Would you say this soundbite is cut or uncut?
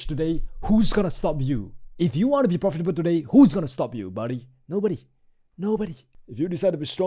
uncut